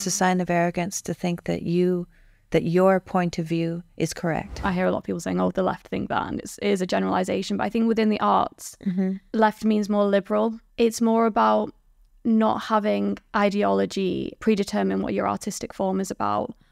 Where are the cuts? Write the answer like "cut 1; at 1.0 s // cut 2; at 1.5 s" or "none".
cut 1; at 4.6 s // cut 2; at 9.2 s // cut 3; at 10.6 s // cut 4; at 14.4 s

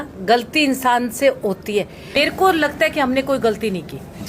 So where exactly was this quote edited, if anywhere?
cut 1; at 2.2 s

